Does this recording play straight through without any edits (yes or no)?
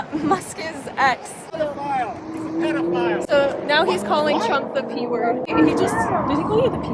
no